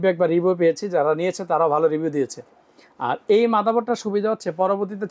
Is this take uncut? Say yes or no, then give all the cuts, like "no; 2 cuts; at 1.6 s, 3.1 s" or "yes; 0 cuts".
yes; 0 cuts